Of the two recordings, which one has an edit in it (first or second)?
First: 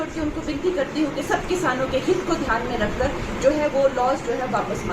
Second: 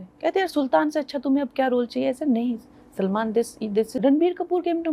second